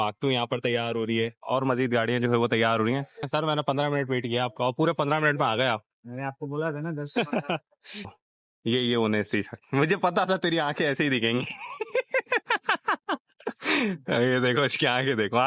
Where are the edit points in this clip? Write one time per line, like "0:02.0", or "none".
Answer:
0:03.3
0:07.9